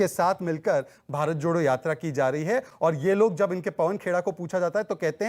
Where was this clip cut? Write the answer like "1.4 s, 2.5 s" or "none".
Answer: none

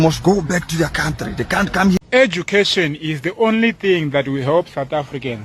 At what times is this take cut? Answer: 2.0 s

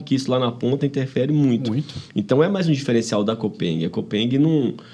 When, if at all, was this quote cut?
none

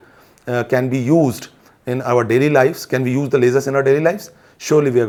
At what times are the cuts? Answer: none

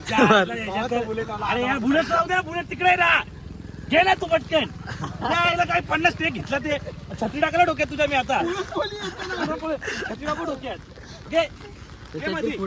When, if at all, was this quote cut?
none

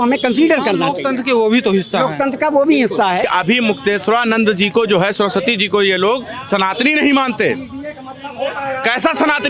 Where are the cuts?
3.3 s

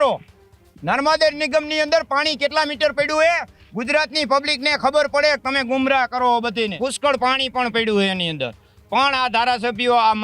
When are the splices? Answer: 6.8 s

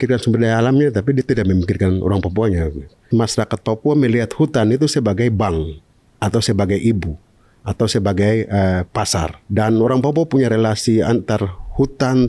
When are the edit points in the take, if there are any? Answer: 3.0 s, 9.4 s

